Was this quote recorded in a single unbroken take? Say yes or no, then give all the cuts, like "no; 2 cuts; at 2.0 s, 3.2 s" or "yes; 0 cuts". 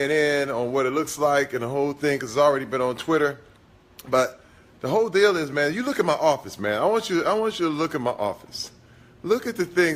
yes; 0 cuts